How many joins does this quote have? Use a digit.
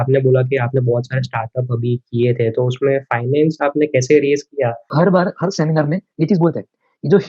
1